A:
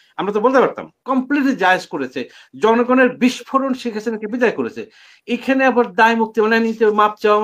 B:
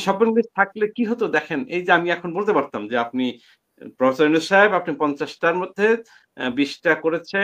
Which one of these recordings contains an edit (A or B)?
A